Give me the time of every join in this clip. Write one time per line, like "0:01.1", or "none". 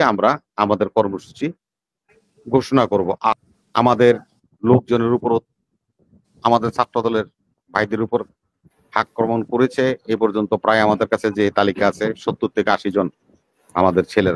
0:03.3

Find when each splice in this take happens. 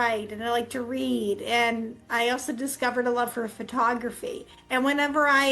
0:04.5

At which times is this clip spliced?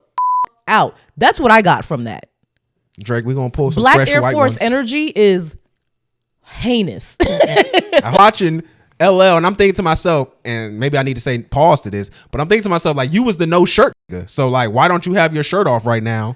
0:08.2

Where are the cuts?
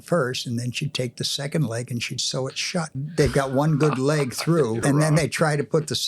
0:03.0
0:04.8

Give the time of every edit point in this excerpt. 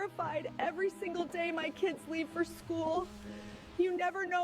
0:01.2

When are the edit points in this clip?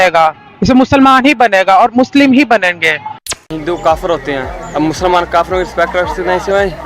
0:03.5

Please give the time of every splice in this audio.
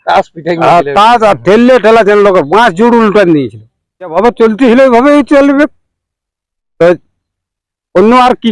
0:04.1

